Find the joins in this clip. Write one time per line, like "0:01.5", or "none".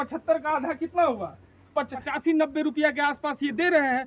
0:02.0